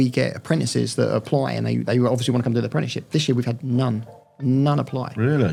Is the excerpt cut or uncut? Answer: uncut